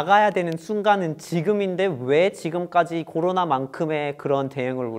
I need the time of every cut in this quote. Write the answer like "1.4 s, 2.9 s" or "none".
none